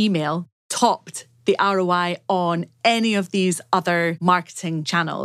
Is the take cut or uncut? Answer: cut